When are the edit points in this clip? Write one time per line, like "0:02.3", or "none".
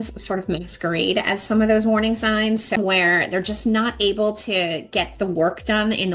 0:02.8